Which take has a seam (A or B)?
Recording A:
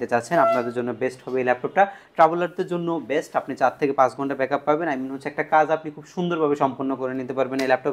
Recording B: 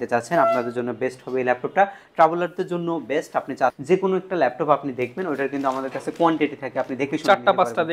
B